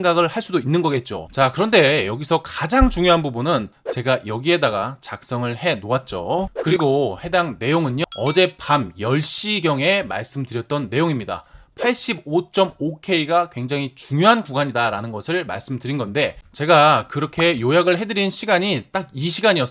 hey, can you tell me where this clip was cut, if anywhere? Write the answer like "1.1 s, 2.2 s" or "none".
1.2 s, 16.5 s